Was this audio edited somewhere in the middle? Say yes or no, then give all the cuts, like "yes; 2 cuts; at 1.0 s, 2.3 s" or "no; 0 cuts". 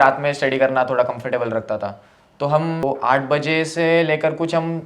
yes; 1 cut; at 2.8 s